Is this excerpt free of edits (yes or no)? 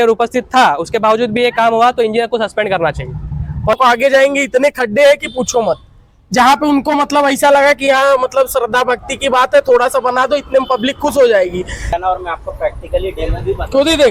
no